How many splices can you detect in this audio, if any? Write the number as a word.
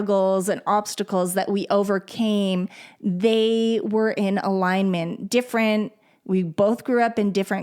zero